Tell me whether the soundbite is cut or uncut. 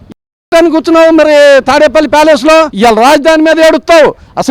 cut